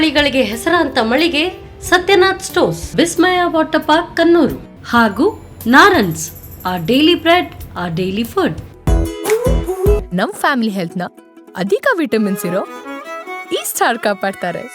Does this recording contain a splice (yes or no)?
yes